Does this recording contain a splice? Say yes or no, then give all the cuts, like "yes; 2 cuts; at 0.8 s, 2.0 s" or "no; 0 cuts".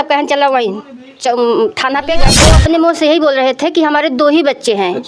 yes; 1 cut; at 2.3 s